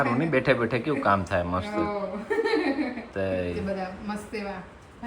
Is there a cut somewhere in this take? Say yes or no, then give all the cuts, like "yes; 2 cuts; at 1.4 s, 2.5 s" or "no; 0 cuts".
yes; 1 cut; at 3.6 s